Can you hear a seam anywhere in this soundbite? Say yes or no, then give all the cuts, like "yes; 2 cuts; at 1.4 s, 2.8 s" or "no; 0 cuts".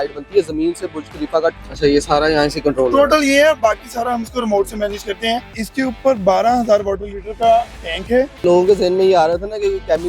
yes; 3 cuts; at 1.5 s, 5.6 s, 8.4 s